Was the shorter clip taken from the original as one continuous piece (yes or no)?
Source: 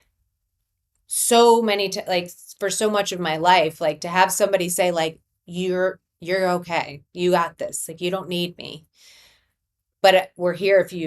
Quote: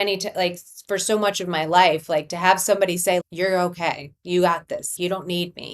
no